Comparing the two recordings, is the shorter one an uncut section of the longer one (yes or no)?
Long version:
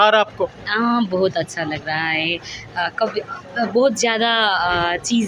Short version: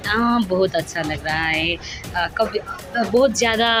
yes